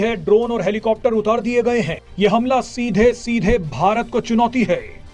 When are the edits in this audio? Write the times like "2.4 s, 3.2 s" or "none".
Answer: 2.0 s